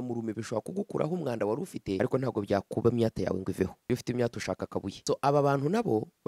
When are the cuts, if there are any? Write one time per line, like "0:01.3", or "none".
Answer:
0:02.0
0:03.8
0:04.9